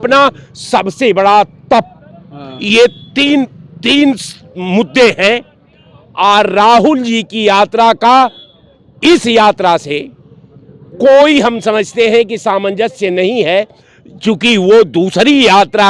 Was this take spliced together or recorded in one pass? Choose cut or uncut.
uncut